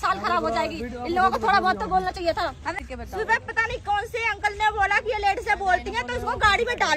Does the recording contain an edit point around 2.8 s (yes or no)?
yes